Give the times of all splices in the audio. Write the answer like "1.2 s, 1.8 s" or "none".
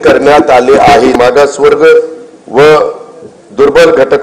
1.1 s